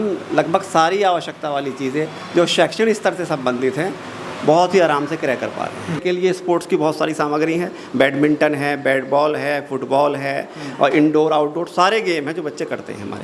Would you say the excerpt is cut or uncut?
cut